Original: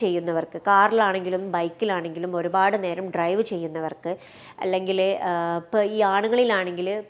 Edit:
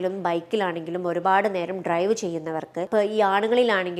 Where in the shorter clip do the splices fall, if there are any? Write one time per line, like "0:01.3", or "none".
0:02.9